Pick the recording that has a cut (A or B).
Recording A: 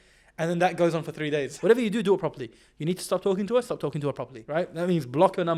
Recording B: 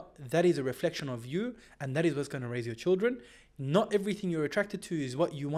A